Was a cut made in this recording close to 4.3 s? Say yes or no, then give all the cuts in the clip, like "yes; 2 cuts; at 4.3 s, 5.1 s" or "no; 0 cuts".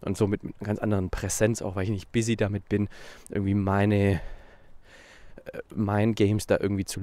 no; 0 cuts